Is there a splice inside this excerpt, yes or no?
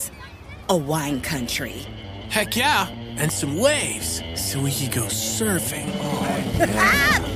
no